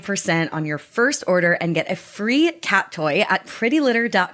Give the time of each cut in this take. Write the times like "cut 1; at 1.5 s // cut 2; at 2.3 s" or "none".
none